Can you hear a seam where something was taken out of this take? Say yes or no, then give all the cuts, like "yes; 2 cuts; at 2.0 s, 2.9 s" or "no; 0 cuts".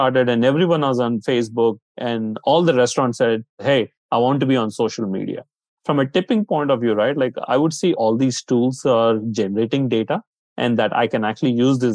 yes; 4 cuts; at 1.9 s, 3.6 s, 5.7 s, 8.0 s